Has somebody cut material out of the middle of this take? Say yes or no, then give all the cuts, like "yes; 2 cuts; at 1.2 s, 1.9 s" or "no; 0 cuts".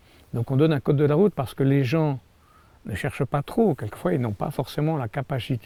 no; 0 cuts